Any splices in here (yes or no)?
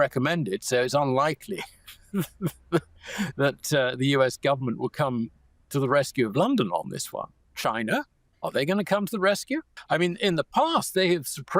yes